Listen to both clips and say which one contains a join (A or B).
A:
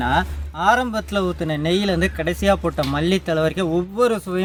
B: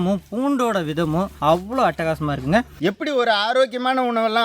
B